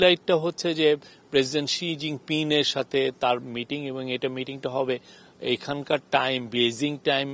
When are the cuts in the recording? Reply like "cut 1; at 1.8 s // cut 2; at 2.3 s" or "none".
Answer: none